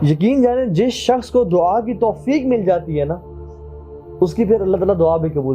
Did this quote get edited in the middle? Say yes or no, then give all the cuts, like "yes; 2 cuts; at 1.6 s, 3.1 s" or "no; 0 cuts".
no; 0 cuts